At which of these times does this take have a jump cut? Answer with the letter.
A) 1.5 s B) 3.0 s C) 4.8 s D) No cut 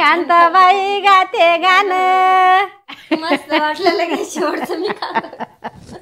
B